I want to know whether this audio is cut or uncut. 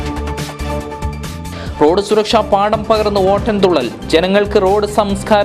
uncut